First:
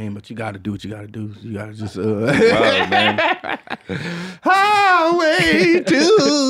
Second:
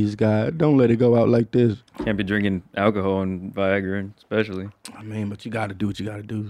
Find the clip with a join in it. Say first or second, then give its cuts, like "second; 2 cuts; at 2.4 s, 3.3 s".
second; 1 cut; at 1.9 s